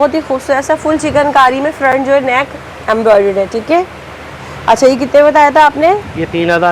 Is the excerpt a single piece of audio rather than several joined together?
yes; 0 cuts

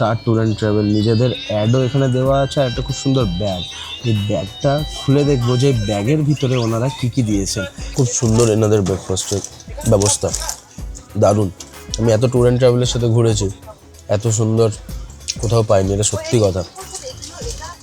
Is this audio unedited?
no; 1 cut; at 7.8 s

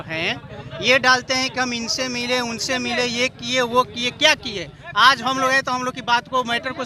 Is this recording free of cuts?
yes; 0 cuts

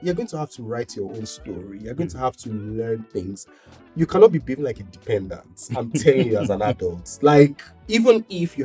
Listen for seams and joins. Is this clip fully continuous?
yes; 0 cuts

